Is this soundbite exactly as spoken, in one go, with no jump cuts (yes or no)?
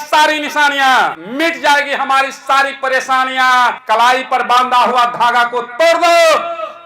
no